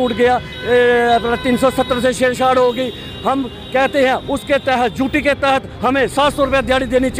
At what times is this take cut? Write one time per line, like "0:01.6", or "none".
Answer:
none